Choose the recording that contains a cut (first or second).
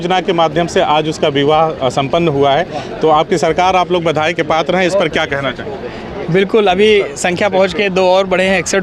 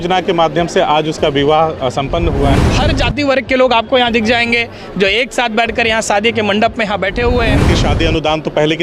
second